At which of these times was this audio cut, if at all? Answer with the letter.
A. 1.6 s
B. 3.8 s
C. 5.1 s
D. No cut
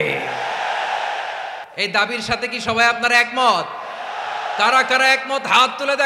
A